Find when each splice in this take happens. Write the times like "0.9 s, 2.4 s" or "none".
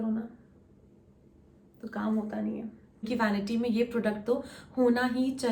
3.1 s

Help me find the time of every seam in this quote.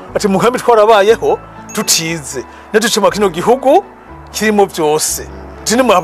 none

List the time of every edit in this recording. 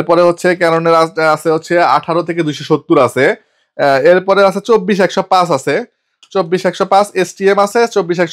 none

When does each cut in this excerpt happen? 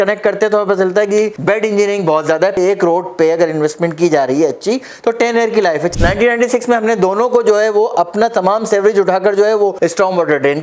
2.6 s, 5.9 s

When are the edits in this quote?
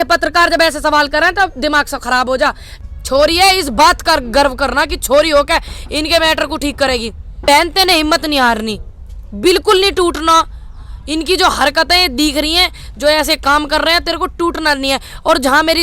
2.7 s, 7.4 s

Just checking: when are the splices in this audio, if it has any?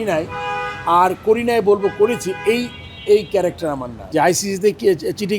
3.9 s

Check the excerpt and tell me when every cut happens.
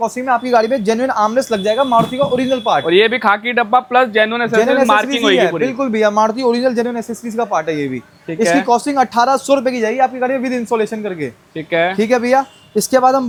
none

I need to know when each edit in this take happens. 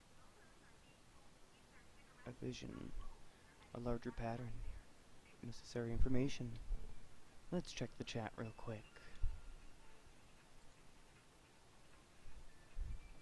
none

